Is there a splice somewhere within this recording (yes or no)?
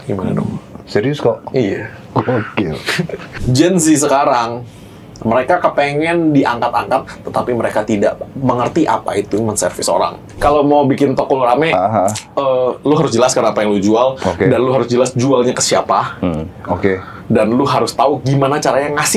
yes